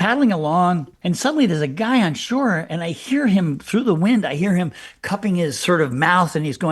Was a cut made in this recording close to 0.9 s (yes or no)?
yes